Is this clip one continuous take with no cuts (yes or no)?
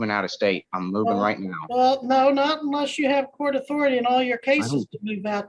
no